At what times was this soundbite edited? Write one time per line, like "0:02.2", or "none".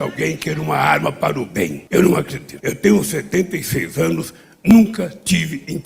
0:01.8
0:02.4